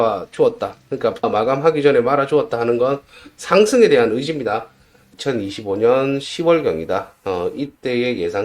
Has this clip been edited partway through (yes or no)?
yes